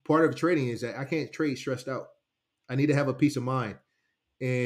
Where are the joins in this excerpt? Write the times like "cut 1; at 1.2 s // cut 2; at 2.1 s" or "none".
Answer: none